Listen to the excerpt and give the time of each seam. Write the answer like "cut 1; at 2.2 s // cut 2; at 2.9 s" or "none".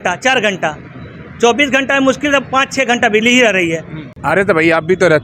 none